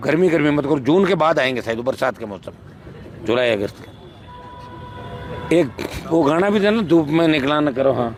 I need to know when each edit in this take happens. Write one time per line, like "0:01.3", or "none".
none